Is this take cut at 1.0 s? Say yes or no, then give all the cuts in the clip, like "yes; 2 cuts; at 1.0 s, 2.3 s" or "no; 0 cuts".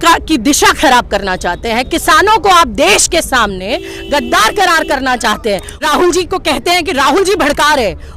no; 1 cut; at 5.7 s